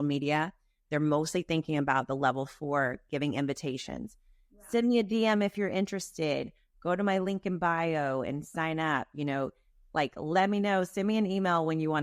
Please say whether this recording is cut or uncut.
uncut